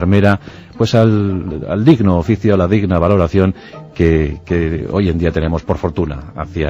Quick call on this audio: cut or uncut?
cut